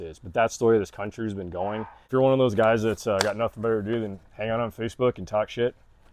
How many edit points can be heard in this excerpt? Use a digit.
1